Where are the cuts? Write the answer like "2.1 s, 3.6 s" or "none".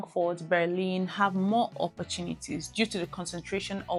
none

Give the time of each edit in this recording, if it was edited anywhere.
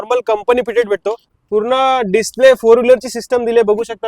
1.3 s

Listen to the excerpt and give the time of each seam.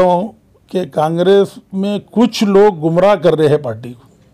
none

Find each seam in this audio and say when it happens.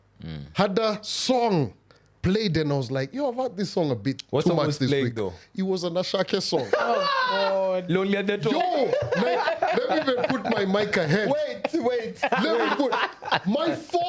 none

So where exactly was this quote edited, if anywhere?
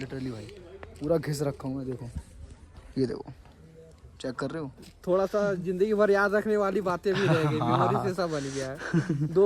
4.9 s

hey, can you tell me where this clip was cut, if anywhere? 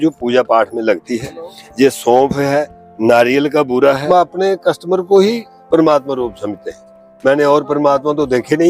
3.7 s

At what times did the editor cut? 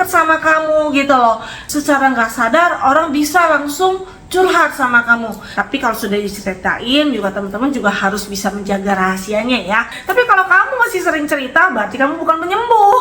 1.5 s, 5.4 s, 10.0 s

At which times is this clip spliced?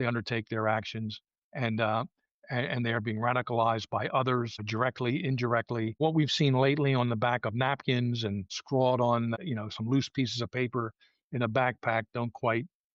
4.6 s, 6.0 s, 8.6 s, 9.3 s

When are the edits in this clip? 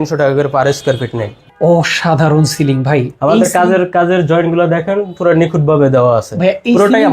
1.3 s

